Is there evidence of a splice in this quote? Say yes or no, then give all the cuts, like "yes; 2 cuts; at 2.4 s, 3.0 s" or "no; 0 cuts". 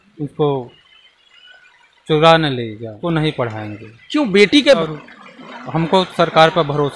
yes; 2 cuts; at 3.0 s, 4.8 s